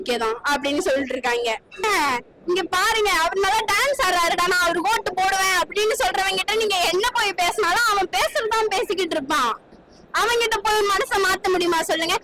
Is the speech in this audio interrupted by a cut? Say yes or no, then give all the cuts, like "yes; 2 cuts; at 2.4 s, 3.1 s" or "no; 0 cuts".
yes; 1 cut; at 1.8 s